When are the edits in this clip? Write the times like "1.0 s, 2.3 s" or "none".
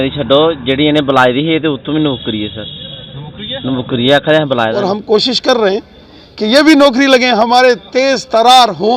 4.8 s